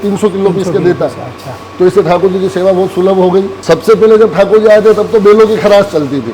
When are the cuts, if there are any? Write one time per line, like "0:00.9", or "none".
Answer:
0:03.5